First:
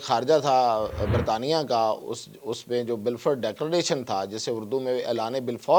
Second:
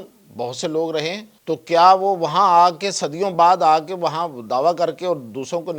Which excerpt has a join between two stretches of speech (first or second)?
second